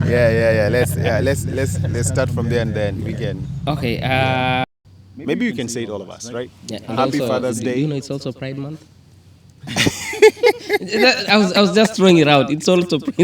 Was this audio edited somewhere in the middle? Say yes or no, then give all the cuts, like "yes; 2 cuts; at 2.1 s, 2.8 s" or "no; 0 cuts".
yes; 1 cut; at 4.6 s